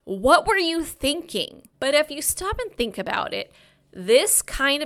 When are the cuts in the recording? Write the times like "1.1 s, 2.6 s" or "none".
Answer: 1.6 s